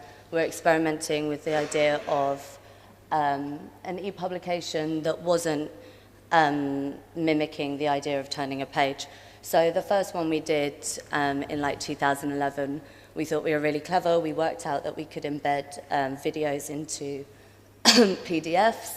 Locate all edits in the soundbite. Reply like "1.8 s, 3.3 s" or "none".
16.2 s